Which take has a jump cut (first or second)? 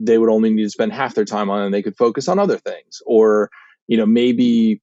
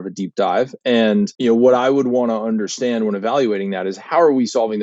second